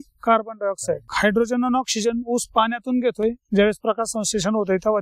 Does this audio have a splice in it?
yes; 1 cut; at 1.1 s

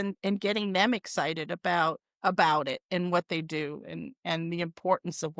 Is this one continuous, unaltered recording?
yes; 0 cuts

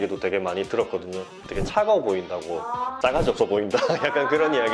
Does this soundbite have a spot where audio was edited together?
no; 0 cuts

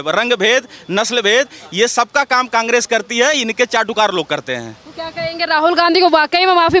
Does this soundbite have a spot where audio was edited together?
no; 0 cuts

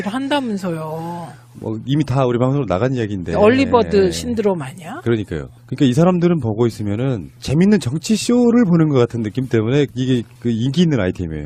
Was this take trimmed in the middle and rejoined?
no; 0 cuts

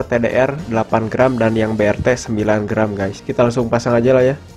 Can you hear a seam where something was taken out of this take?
yes; 1 cut; at 3.2 s

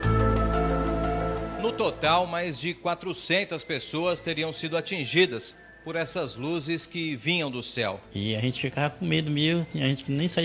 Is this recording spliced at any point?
yes; 2 cuts; at 1.5 s, 8.1 s

